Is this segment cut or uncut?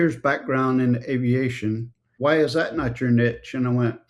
cut